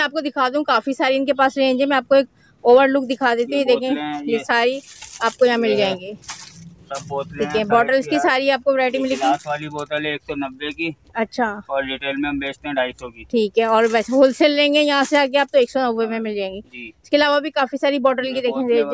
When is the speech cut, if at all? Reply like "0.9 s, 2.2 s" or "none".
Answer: none